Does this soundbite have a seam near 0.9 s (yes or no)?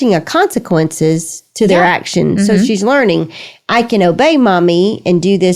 no